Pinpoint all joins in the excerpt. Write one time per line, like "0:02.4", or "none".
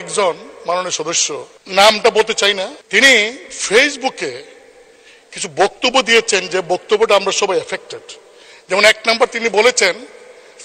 0:01.6
0:02.8